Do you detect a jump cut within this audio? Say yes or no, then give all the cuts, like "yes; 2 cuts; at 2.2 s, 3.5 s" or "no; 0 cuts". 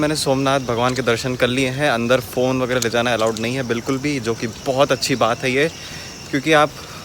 no; 0 cuts